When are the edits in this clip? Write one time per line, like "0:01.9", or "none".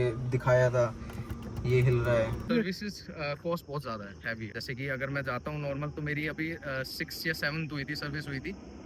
0:02.5
0:04.6